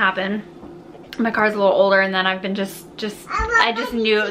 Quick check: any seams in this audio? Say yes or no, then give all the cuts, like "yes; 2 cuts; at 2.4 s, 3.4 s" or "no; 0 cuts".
no; 0 cuts